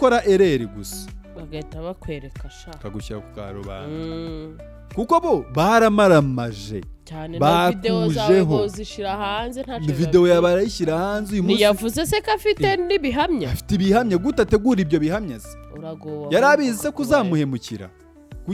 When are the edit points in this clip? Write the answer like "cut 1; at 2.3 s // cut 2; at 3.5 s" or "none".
none